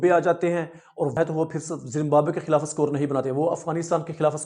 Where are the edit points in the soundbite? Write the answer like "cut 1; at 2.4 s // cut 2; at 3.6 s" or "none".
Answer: cut 1; at 1.2 s